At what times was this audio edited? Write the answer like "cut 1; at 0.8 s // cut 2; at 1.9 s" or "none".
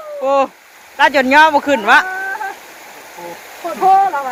none